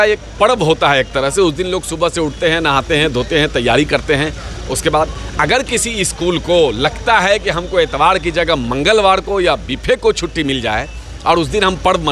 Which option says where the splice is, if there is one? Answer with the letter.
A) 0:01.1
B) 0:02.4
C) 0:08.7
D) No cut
D